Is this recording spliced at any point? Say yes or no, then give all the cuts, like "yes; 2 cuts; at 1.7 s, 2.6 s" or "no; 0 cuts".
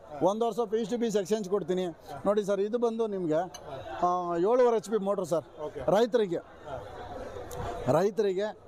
no; 0 cuts